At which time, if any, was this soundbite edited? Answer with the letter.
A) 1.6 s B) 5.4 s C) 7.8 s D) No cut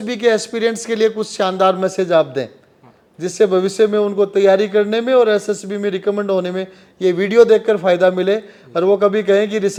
D